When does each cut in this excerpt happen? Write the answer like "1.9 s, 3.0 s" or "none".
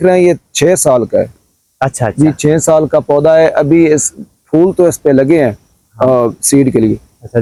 none